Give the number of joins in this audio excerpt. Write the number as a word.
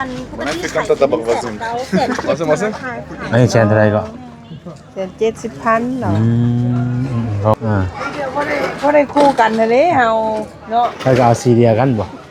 one